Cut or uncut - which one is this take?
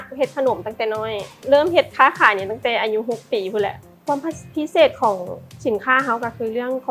cut